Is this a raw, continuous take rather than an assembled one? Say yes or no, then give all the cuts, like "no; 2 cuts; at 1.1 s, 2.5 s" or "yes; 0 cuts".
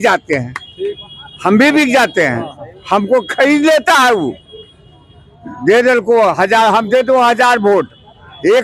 yes; 0 cuts